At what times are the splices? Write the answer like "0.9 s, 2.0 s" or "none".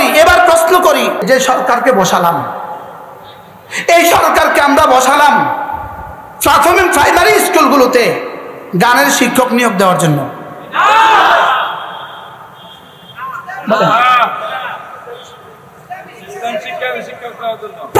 1.2 s